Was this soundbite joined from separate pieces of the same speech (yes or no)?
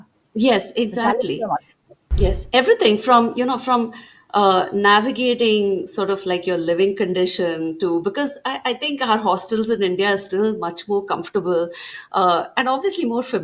no